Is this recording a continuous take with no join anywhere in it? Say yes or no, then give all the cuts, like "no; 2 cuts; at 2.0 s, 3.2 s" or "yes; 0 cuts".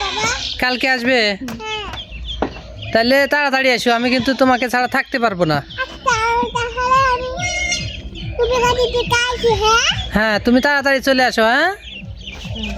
yes; 0 cuts